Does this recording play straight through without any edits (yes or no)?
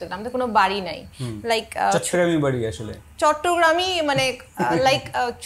yes